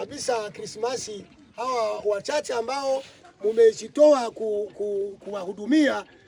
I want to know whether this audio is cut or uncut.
uncut